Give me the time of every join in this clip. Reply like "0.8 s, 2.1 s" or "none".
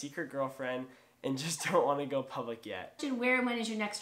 3.0 s